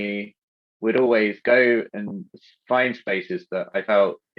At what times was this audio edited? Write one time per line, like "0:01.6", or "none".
none